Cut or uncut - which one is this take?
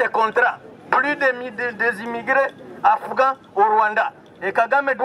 uncut